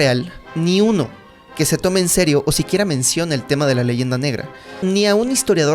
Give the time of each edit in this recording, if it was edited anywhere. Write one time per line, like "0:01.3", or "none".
0:04.8